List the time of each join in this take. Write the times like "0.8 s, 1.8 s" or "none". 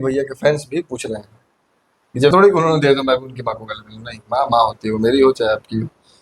2.3 s